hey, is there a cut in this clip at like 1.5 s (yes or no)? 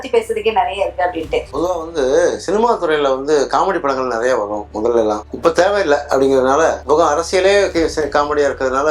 yes